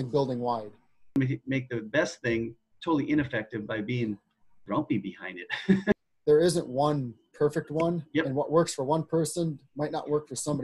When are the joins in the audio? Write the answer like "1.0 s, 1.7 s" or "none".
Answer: 1.2 s, 5.9 s